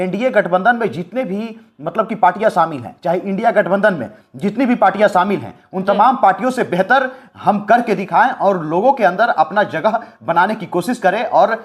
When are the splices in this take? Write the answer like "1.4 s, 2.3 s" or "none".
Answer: none